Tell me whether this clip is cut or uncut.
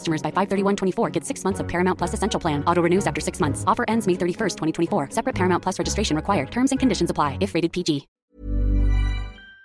cut